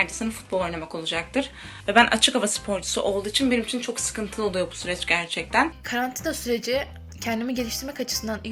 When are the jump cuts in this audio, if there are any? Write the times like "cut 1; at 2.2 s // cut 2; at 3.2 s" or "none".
cut 1; at 1.7 s // cut 2; at 5.8 s